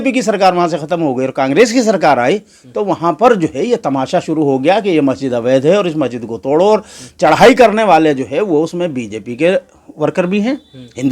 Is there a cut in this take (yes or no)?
no